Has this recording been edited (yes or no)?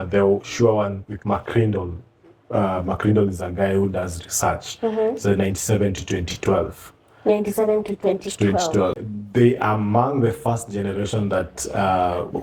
yes